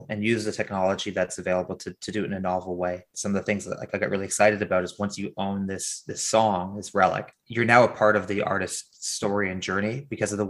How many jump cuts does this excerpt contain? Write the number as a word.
two